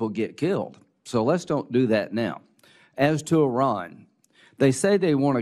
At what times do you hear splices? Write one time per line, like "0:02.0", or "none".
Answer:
none